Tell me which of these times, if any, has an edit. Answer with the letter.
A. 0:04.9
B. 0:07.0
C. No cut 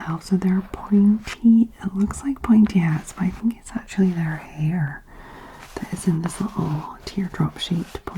C